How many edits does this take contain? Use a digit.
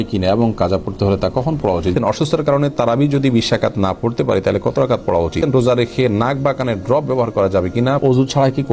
3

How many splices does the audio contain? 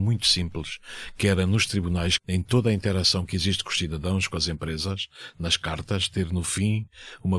1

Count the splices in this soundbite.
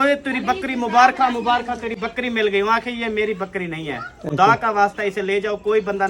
0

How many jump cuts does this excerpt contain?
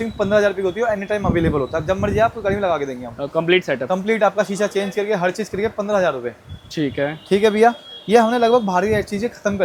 0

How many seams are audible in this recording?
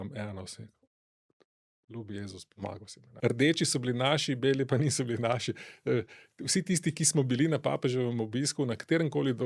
1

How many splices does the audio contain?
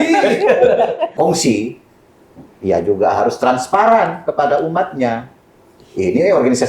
1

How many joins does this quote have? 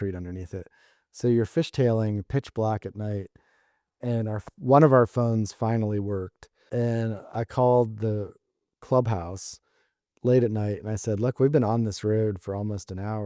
1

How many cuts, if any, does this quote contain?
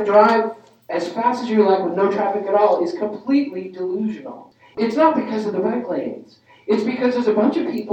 1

